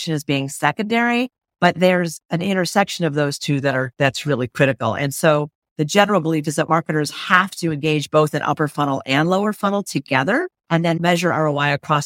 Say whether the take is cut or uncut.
cut